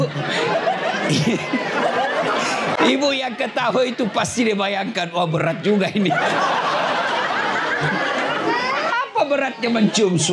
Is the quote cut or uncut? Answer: uncut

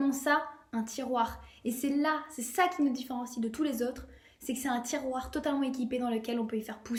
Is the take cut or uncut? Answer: uncut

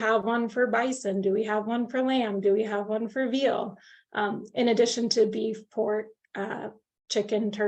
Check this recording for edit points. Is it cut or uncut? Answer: uncut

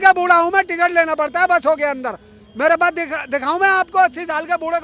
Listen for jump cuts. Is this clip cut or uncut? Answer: uncut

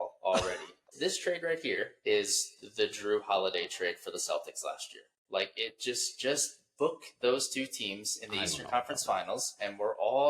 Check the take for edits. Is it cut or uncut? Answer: cut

